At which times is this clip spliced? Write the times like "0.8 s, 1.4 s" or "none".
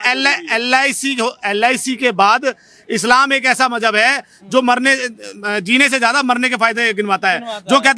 none

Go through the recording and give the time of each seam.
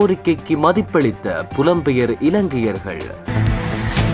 3.2 s

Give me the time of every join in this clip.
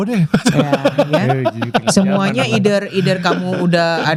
none

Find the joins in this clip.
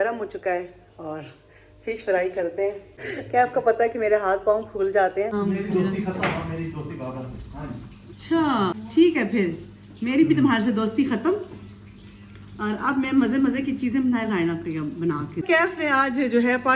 3.0 s, 5.3 s, 8.8 s, 15.4 s

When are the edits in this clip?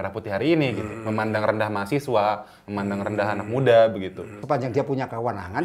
4.4 s

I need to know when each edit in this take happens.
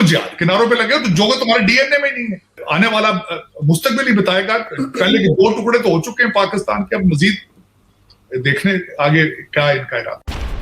none

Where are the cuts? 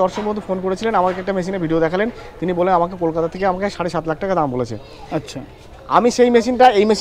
none

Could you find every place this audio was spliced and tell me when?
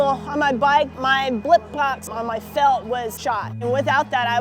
0.9 s, 2.1 s, 3.6 s

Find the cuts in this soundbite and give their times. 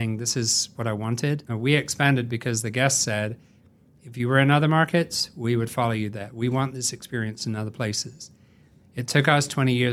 1.5 s

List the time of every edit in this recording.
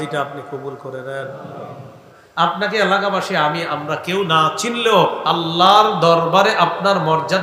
2.2 s

